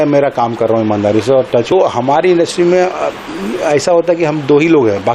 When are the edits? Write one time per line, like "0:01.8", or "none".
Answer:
0:01.7